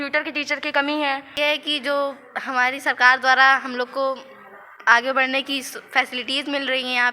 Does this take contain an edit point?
yes; 1 cut; at 1.3 s

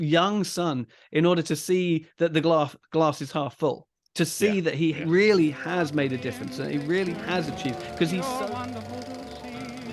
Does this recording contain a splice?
yes; 1 cut; at 8.2 s

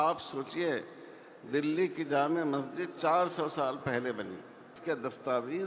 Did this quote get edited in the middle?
yes; 1 cut; at 4.7 s

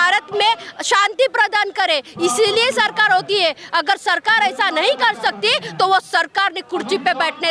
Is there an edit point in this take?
no; 0 cuts

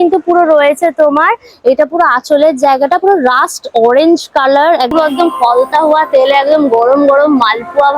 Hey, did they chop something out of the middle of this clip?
yes; 1 cut; at 4.9 s

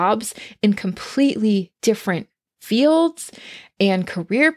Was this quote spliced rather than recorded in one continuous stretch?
no; 0 cuts

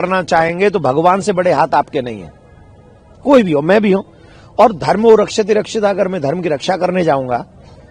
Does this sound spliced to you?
no; 0 cuts

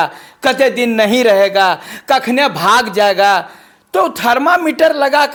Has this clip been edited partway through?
no; 0 cuts

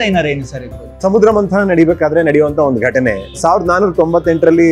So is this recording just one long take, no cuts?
no; 2 cuts; at 1.0 s, 3.4 s

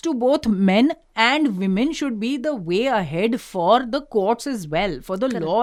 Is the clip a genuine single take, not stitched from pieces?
yes; 0 cuts

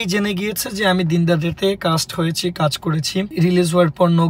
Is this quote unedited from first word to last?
no; 1 cut; at 3.3 s

